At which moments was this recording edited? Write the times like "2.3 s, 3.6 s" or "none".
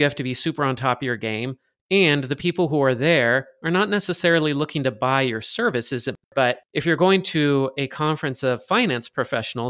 6.2 s